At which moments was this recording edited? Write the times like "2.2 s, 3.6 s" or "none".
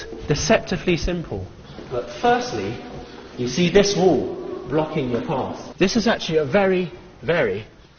3.9 s

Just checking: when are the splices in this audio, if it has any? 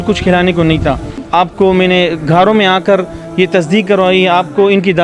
1.1 s

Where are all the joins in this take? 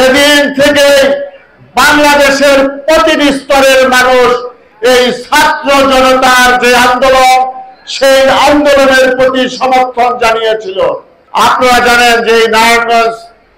11.1 s

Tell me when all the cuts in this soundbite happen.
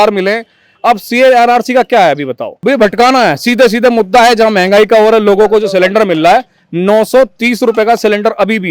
none

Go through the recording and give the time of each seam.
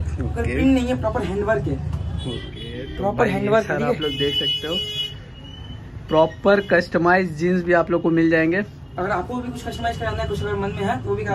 none

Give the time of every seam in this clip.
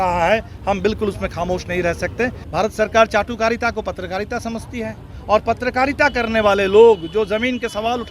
2.4 s

